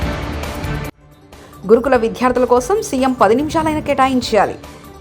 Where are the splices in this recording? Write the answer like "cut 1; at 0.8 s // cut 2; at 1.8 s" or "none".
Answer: none

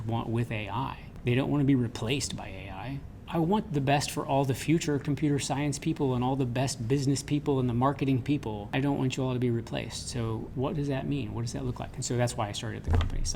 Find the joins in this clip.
cut 1; at 1.1 s // cut 2; at 3.2 s // cut 3; at 8.7 s // cut 4; at 10.5 s

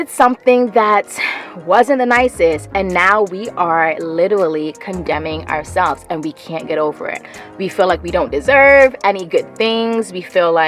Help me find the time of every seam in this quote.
none

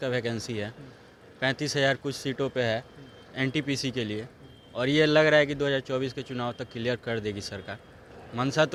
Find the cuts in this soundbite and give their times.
none

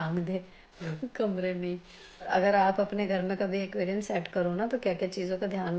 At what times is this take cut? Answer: cut 1; at 2.3 s

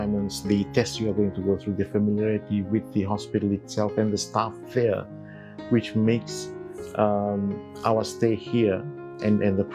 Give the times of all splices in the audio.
none

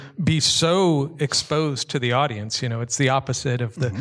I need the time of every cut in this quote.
none

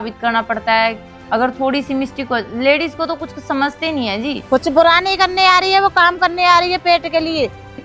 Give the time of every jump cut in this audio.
cut 1; at 4.4 s

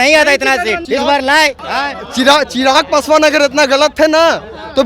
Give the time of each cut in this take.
cut 1; at 0.8 s // cut 2; at 1.6 s

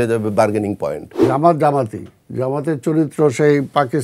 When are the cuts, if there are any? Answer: cut 1; at 1.1 s

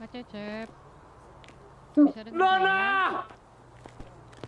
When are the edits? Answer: none

